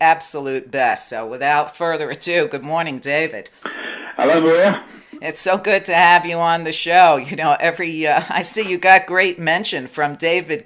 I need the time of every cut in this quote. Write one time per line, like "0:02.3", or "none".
0:03.1